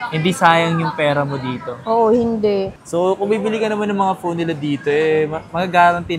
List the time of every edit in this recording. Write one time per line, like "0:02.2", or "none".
0:02.7